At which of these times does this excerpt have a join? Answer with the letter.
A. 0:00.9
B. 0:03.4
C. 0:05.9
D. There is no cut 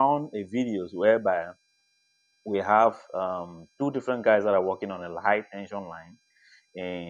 A